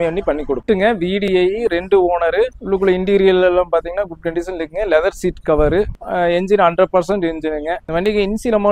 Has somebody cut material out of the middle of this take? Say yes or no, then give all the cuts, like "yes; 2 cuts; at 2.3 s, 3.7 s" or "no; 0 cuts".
yes; 3 cuts; at 2.5 s, 6.0 s, 7.8 s